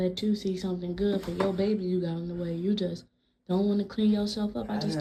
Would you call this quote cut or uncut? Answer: uncut